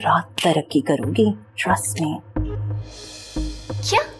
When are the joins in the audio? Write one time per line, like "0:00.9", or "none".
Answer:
none